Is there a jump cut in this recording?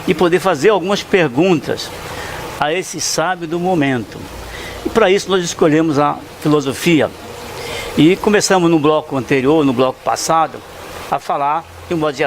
yes; 1 cut; at 2.1 s

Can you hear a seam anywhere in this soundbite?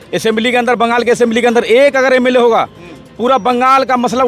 no; 0 cuts

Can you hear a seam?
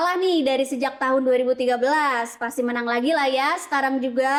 no; 0 cuts

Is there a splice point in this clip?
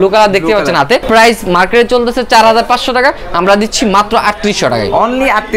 yes; 1 cut; at 1.0 s

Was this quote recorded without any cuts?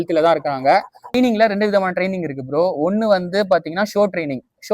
no; 1 cut; at 1.1 s

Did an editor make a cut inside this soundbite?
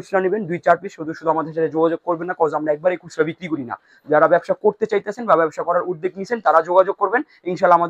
no; 0 cuts

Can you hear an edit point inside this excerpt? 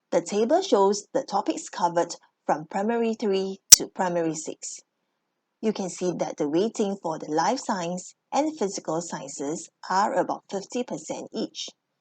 yes; 1 cut; at 1.0 s

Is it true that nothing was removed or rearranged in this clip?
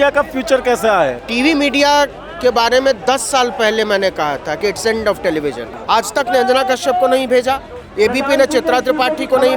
no; 2 cuts; at 1.2 s, 5.7 s

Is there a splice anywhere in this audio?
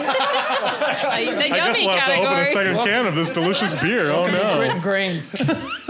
no; 0 cuts

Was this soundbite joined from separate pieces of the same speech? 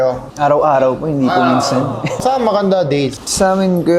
yes; 1 cut; at 2.2 s

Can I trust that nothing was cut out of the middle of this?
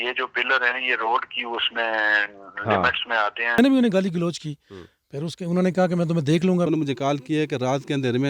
no; 2 cuts; at 3.6 s, 6.7 s

